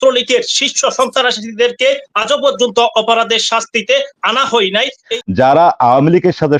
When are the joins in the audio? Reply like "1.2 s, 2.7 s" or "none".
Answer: 5.1 s